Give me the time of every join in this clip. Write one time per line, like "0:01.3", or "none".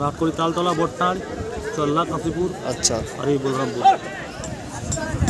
0:04.4